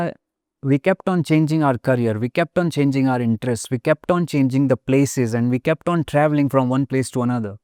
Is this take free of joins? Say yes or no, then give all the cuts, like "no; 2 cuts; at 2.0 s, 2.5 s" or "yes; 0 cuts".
yes; 0 cuts